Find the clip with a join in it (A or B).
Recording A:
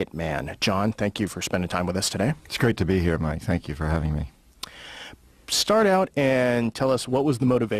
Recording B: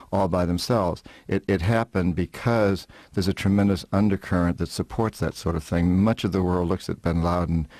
B